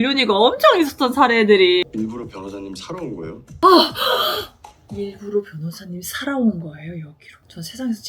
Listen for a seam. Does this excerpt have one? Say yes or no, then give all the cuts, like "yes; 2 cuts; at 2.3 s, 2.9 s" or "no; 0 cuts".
yes; 2 cuts; at 1.8 s, 3.6 s